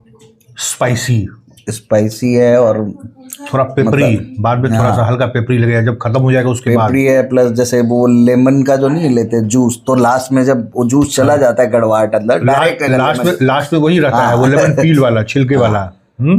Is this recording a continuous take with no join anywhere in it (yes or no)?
yes